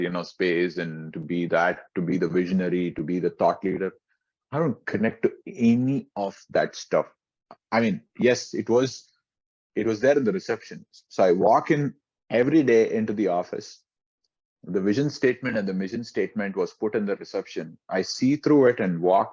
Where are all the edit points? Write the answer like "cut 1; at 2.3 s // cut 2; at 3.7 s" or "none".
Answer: none